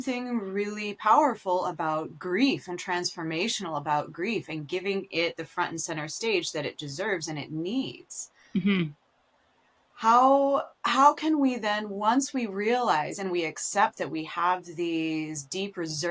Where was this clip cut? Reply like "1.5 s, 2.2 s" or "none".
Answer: none